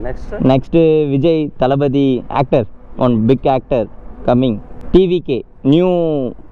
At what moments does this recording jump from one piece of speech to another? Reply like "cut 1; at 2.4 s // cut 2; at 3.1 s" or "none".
cut 1; at 4.7 s